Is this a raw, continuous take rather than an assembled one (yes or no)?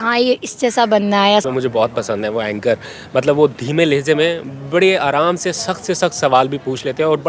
no